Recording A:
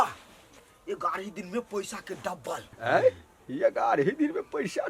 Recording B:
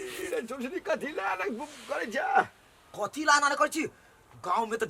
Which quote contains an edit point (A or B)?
A